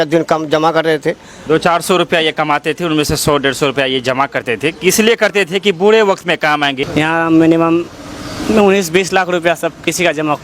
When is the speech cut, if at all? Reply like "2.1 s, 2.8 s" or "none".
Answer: 6.8 s